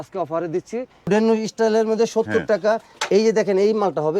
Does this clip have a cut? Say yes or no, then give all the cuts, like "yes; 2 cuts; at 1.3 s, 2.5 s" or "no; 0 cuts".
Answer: yes; 1 cut; at 1.1 s